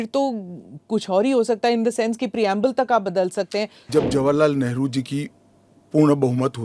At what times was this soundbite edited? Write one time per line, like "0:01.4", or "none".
0:03.8